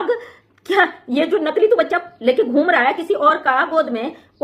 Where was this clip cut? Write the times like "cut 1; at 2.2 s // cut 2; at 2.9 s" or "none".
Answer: none